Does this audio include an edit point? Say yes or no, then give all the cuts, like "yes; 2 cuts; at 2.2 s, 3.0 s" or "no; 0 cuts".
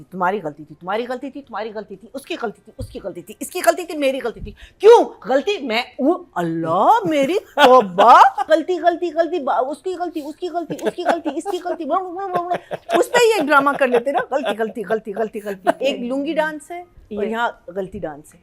yes; 2 cuts; at 8.4 s, 15.8 s